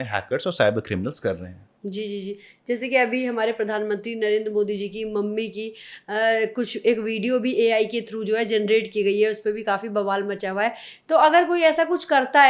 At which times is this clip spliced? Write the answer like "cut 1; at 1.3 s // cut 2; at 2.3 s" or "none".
none